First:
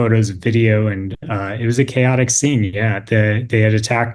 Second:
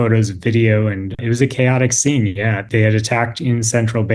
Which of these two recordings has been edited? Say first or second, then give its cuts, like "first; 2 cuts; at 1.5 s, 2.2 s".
second; 2 cuts; at 1.2 s, 2.6 s